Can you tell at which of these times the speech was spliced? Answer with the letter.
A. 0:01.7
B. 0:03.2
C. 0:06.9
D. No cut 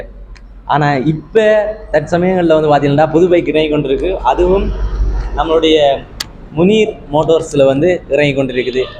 D